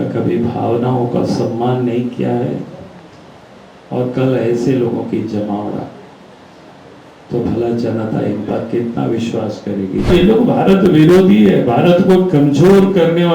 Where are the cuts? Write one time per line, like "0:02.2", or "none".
0:10.1